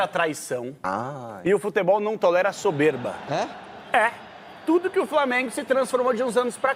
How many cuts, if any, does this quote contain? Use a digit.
0